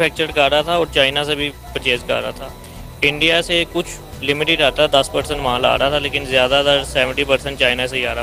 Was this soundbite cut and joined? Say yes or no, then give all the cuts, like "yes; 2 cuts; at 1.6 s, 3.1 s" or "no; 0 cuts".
no; 0 cuts